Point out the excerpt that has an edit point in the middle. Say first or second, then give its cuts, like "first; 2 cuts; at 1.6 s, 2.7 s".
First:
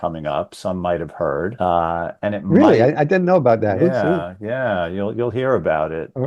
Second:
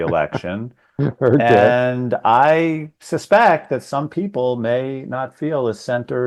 first; 1 cut; at 1.5 s